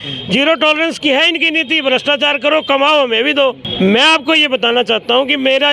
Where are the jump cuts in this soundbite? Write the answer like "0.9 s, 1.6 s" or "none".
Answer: none